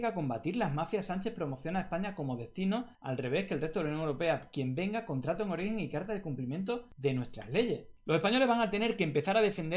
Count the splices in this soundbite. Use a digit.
3